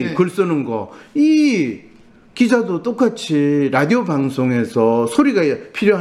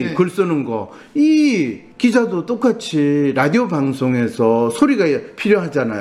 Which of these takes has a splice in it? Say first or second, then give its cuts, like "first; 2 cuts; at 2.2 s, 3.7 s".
second; 1 cut; at 1.8 s